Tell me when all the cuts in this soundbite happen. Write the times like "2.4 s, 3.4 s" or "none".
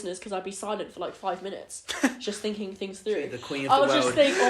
3.4 s

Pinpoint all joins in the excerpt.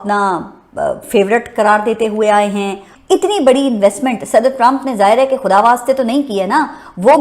2.9 s

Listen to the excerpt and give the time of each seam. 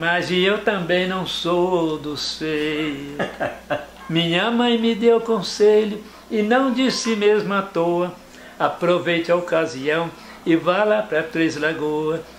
3.9 s

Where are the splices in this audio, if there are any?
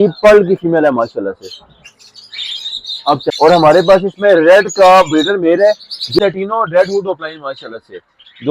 3.3 s, 6.2 s

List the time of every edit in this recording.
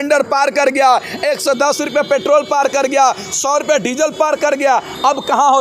none

